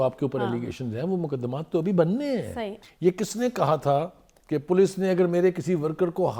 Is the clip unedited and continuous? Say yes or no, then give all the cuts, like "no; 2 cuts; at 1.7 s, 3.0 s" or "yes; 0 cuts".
yes; 0 cuts